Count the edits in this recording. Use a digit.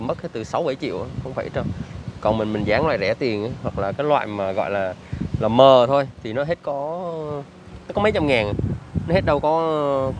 0